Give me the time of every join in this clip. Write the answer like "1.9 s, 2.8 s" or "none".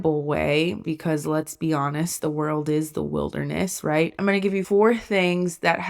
0.8 s, 4.3 s